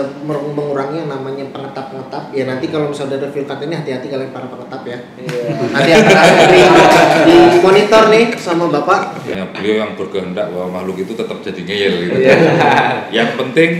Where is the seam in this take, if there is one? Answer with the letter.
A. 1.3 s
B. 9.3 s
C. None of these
B